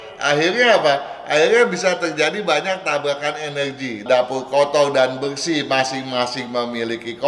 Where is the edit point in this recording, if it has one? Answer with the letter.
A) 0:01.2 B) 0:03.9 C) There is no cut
B